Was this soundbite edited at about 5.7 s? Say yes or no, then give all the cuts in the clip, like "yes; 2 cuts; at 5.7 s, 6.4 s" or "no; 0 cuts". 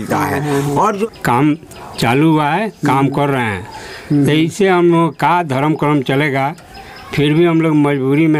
no; 1 cut; at 1.0 s